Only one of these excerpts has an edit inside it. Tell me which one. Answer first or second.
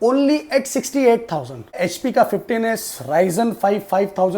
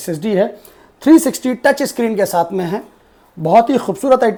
first